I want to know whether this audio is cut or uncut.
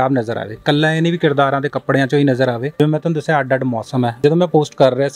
cut